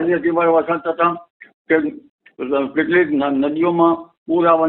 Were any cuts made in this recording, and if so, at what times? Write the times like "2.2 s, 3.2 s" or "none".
none